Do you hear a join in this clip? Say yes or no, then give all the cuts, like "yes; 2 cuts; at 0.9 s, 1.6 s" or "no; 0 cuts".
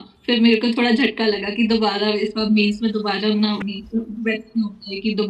yes; 1 cut; at 3.6 s